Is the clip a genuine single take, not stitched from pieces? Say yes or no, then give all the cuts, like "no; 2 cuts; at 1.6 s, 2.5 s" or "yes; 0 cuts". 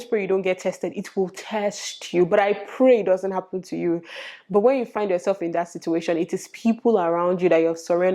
yes; 0 cuts